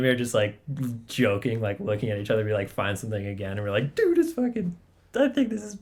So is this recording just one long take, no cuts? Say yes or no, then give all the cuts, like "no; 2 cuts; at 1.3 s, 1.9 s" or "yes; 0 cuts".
yes; 0 cuts